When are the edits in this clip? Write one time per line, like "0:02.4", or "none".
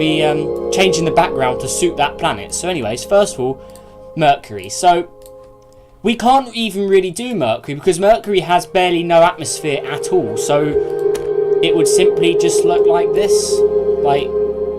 0:03.0